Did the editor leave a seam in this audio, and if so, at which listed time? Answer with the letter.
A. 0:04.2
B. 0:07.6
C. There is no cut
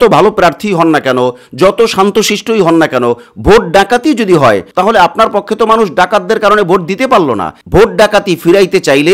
B